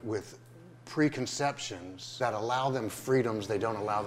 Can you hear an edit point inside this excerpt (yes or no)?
yes